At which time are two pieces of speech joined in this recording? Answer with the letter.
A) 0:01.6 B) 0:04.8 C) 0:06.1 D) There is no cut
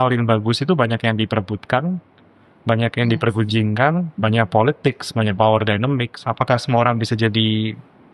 C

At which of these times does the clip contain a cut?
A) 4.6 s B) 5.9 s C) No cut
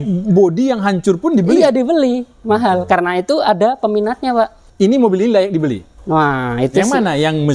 A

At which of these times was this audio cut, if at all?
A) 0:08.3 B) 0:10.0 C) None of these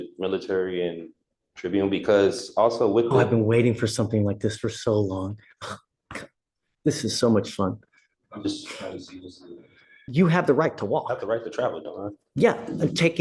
B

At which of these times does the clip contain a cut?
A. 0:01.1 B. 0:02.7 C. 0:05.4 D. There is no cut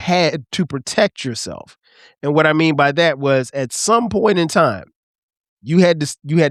D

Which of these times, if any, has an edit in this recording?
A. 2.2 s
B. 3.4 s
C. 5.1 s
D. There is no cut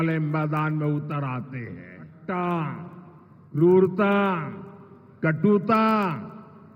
A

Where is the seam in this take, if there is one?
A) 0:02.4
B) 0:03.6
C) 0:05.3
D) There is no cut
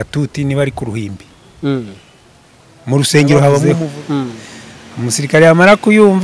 B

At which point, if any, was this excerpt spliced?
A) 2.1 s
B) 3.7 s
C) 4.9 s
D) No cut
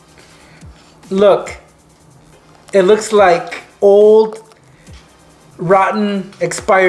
D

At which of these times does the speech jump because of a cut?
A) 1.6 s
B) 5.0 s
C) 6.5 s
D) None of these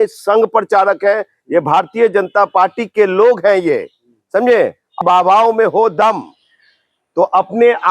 B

